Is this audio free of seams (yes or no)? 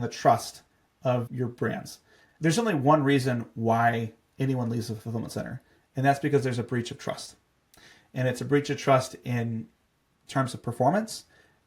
no